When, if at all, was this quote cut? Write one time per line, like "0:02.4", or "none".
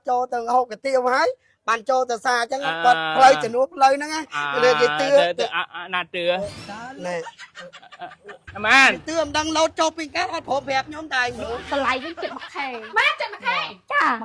0:08.5
0:11.6